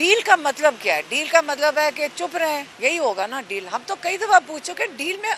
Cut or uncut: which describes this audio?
cut